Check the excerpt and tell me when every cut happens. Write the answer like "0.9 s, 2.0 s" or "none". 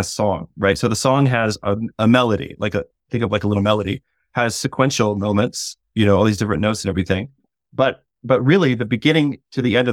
none